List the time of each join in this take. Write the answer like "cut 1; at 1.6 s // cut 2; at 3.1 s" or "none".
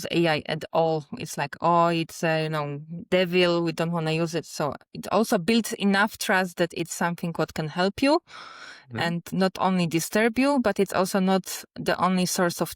cut 1; at 9.3 s